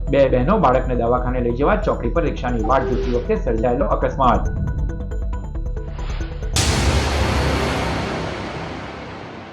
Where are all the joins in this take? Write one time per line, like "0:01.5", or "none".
0:06.4